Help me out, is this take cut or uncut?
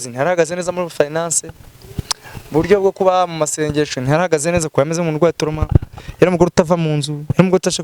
uncut